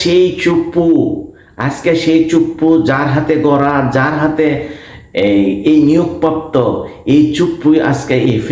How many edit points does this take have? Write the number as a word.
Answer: zero